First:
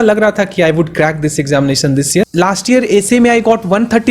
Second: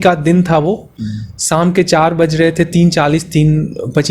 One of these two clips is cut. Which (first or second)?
first